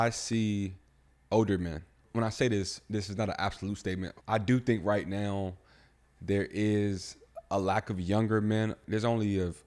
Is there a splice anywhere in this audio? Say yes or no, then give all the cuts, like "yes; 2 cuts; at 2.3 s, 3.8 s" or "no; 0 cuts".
yes; 4 cuts; at 1.1 s, 2.0 s, 4.1 s, 8.8 s